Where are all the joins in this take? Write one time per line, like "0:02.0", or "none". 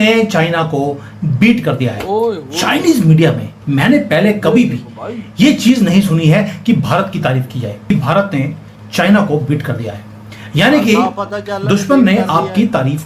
0:07.9